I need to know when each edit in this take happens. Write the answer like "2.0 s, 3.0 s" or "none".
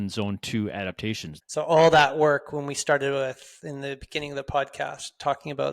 1.3 s